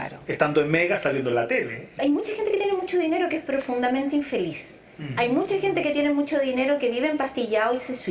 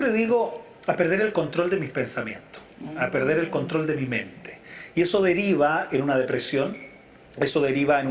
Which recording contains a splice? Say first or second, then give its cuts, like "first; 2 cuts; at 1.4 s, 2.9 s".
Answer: first; 1 cut; at 2.0 s